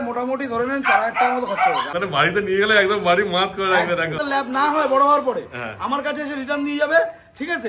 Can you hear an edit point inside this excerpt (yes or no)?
yes